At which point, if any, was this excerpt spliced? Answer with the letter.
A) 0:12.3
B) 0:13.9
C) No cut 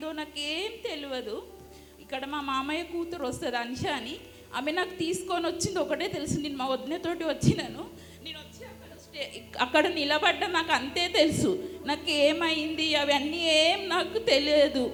C